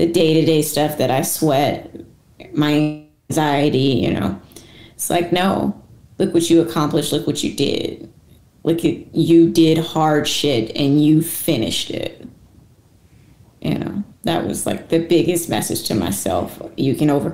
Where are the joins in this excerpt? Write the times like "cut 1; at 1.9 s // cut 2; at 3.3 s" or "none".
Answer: none

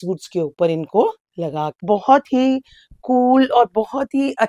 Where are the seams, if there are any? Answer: cut 1; at 1.8 s

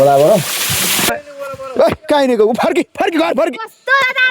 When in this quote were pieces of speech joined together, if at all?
cut 1; at 1.3 s

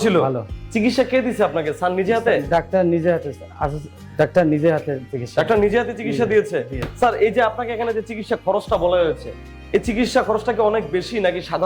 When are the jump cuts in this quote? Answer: cut 1; at 6.8 s

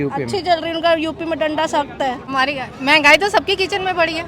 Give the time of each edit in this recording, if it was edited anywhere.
cut 1; at 2.2 s

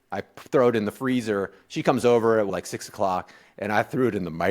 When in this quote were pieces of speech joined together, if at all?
cut 1; at 2.5 s

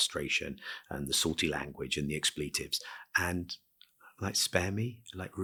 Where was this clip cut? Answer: none

